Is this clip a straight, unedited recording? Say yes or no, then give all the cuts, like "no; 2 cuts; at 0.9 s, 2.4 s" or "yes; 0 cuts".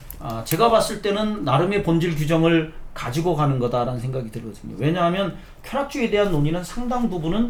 yes; 0 cuts